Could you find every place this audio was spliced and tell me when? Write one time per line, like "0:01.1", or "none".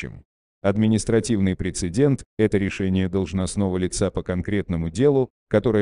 none